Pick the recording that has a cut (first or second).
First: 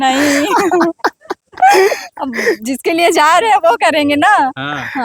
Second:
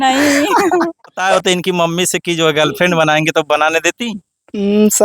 second